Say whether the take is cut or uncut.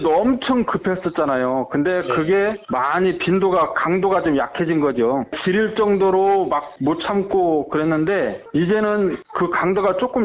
uncut